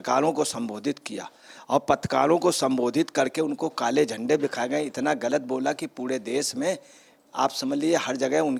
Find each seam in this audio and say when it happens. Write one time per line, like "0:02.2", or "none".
none

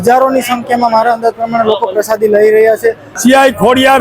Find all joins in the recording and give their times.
0:03.1

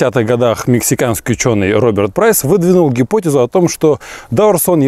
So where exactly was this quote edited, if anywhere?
none

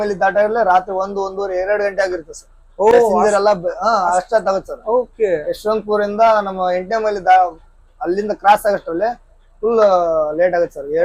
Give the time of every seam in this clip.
none

